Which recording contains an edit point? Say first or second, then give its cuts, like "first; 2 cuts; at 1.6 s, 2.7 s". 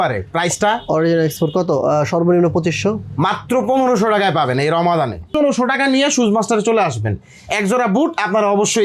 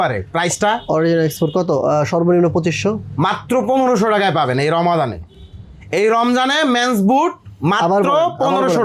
first; 1 cut; at 5.4 s